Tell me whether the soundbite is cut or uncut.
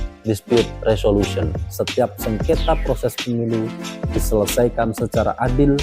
cut